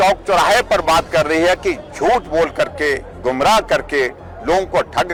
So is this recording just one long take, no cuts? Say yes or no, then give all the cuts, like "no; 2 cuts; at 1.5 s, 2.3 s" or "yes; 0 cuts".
yes; 0 cuts